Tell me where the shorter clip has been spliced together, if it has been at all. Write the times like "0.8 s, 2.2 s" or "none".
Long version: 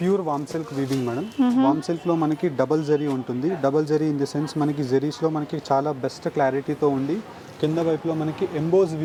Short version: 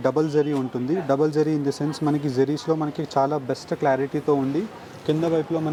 none